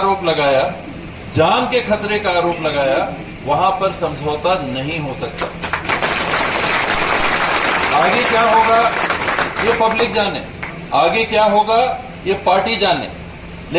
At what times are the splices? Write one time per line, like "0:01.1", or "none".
none